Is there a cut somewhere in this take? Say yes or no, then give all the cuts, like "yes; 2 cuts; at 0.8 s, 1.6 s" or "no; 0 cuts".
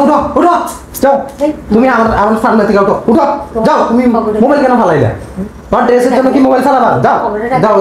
no; 0 cuts